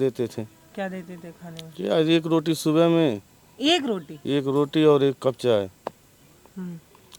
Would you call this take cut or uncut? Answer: uncut